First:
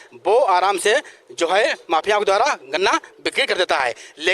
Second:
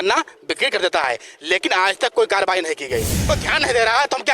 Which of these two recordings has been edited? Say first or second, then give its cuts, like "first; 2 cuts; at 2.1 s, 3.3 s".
second; 1 cut; at 3.3 s